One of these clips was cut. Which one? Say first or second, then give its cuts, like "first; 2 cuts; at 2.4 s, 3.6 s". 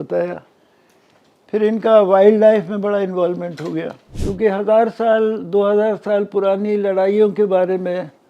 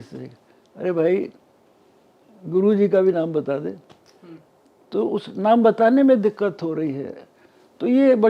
first; 1 cut; at 4.0 s